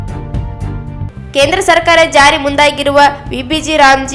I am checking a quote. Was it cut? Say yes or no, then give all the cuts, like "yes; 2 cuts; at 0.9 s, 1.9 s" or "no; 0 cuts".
no; 0 cuts